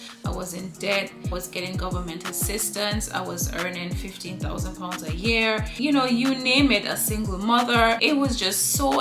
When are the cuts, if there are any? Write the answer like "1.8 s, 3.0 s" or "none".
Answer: none